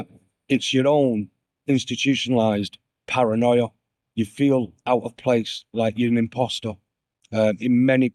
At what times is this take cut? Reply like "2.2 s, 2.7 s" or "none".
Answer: none